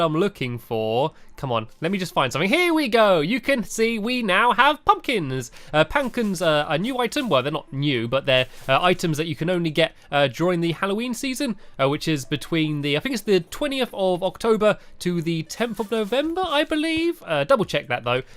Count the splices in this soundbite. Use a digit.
1